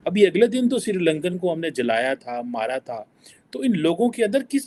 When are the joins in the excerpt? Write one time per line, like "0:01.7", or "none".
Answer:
none